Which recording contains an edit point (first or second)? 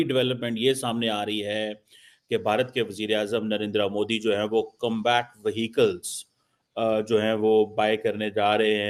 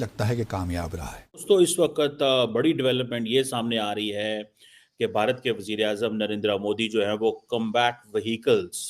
second